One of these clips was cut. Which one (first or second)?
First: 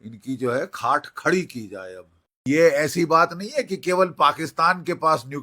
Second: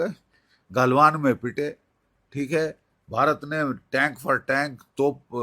first